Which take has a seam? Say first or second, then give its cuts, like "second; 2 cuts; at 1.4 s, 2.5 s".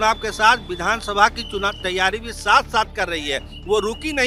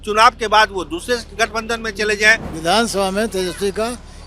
second; 1 cut; at 2.5 s